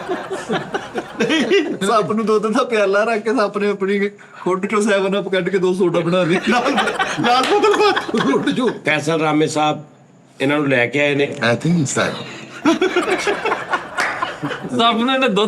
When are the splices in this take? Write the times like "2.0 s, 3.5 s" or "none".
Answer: 1.8 s, 8.8 s, 14.6 s